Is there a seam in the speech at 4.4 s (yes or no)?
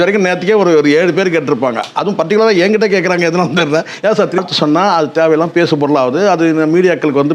no